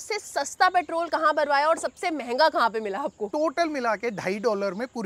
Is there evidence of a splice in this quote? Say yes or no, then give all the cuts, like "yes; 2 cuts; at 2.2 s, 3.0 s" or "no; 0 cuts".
yes; 1 cut; at 3.3 s